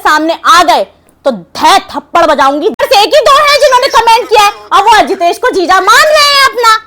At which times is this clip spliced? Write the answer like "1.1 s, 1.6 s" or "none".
2.8 s